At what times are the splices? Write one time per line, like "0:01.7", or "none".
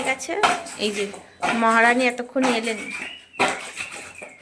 none